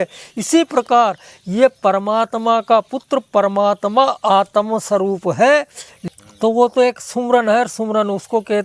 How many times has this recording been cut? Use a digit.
1